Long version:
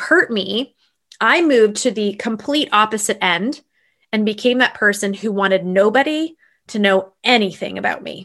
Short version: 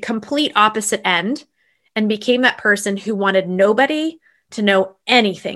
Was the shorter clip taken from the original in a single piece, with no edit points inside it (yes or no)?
yes